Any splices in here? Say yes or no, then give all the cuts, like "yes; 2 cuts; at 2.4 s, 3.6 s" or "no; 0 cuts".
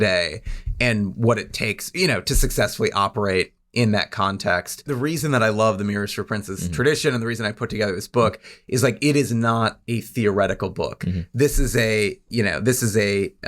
yes; 1 cut; at 4.9 s